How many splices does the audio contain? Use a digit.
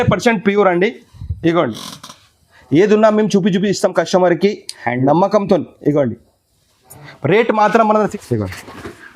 1